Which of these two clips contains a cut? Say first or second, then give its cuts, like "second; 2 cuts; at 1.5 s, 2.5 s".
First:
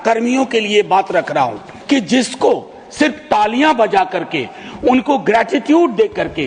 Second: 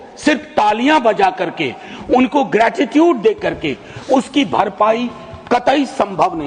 first; 1 cut; at 1.7 s